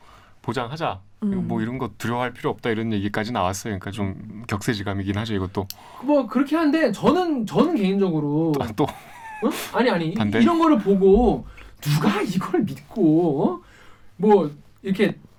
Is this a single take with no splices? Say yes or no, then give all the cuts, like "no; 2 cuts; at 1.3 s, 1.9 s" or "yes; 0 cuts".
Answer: yes; 0 cuts